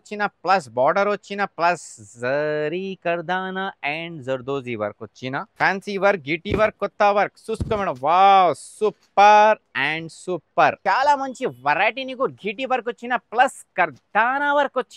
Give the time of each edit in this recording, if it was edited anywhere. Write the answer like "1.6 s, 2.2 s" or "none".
5.5 s, 10.8 s